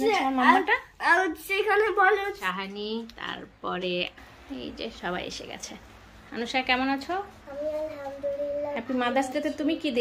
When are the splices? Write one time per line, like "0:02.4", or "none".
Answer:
0:02.4